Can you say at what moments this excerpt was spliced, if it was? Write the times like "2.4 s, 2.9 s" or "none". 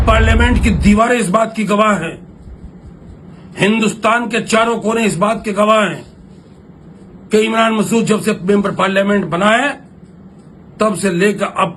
none